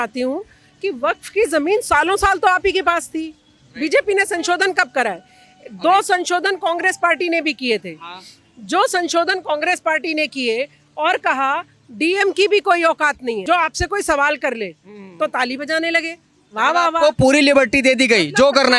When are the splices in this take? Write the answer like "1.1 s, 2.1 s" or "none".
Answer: 13.4 s

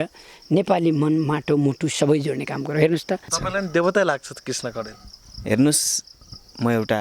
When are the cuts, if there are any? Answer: 3.3 s

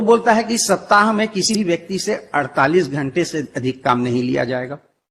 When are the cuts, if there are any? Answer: 1.5 s

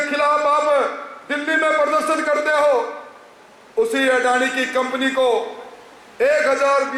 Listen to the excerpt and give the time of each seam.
none

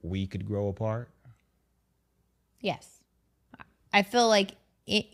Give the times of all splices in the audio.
none

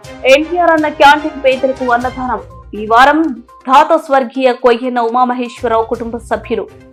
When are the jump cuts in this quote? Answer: none

